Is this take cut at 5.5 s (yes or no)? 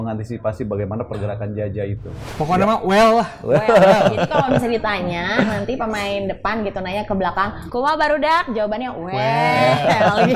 no